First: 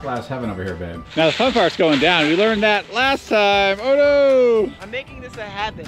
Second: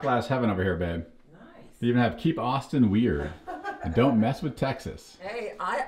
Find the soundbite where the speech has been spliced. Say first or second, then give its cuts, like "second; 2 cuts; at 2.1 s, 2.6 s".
first; 2 cuts; at 1.1 s, 4.8 s